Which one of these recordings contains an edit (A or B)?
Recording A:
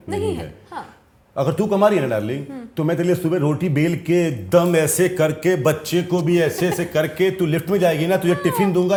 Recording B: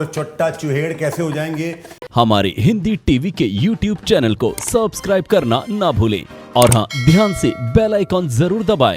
B